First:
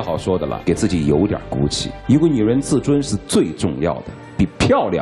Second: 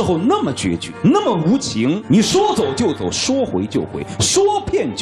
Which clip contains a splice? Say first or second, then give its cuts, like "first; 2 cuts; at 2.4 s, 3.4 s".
second; 2 cuts; at 0.9 s, 2.0 s